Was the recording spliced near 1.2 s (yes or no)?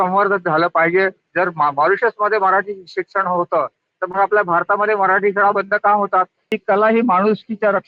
yes